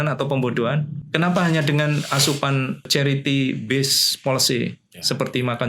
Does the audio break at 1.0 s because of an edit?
yes; 2 cuts; at 1.0 s, 2.9 s

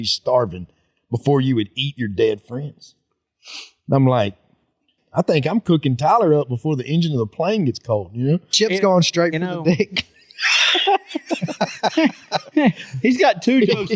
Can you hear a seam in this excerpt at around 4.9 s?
yes; 1 cut; at 4.9 s

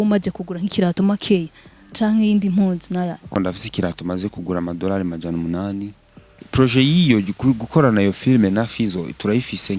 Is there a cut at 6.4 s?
yes; 2 cuts; at 3.3 s, 6.4 s

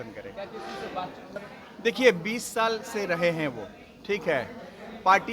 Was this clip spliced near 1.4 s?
yes; 1 cut; at 1.4 s

